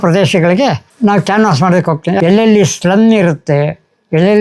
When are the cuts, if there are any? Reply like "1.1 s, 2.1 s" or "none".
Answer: 2.2 s